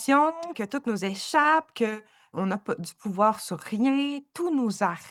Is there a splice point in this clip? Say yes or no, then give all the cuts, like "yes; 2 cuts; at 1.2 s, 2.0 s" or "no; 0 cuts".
no; 0 cuts